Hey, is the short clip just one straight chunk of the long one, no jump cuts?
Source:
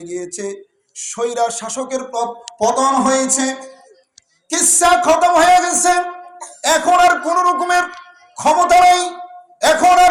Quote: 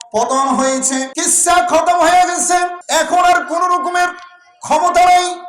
no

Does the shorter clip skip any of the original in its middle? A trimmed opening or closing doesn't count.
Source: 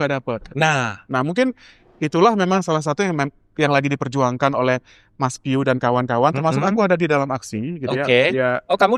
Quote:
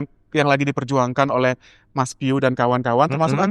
no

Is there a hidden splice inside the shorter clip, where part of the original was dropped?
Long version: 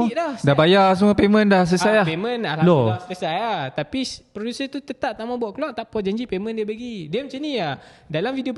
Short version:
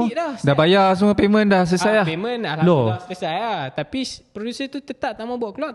no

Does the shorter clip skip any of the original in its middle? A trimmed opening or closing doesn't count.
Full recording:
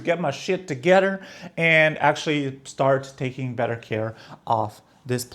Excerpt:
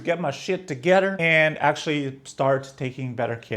yes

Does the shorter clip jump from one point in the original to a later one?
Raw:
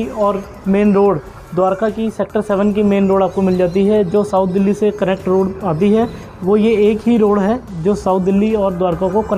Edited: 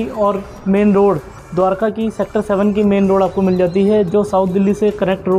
no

